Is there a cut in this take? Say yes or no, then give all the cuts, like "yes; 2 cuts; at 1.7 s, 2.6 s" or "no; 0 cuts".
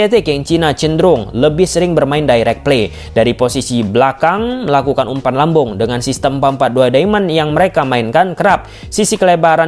no; 0 cuts